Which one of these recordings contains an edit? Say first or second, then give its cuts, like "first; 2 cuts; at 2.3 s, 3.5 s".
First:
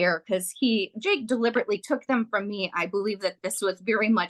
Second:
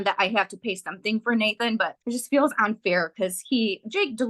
second; 1 cut; at 2.0 s